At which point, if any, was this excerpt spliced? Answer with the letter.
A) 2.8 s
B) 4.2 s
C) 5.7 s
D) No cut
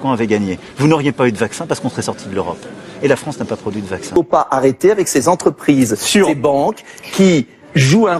B